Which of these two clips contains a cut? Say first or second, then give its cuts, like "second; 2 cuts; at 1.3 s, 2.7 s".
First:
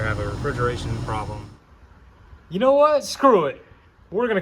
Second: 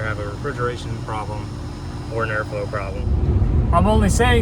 first; 1 cut; at 1.4 s